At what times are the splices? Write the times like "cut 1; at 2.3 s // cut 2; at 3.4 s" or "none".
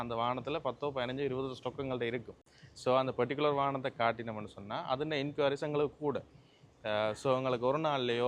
none